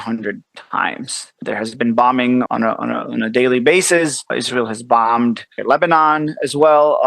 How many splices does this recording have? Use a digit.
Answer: 4